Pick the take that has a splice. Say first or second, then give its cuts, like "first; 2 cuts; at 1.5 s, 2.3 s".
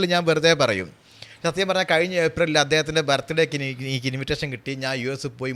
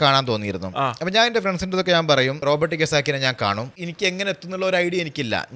second; 2 cuts; at 2.4 s, 3.8 s